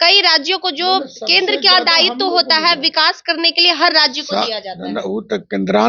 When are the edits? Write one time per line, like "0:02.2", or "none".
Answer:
none